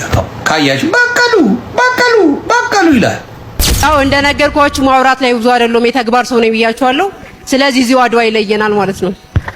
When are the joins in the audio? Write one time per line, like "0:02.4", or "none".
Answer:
0:03.8